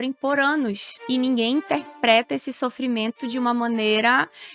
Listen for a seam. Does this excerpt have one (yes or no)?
no